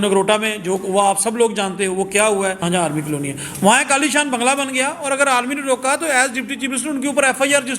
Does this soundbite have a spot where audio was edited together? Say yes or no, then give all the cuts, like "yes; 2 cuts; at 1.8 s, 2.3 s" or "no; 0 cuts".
yes; 1 cut; at 2.6 s